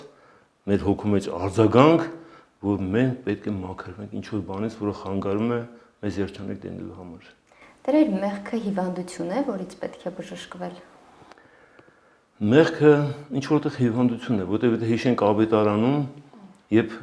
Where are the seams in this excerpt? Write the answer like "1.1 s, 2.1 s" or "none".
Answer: none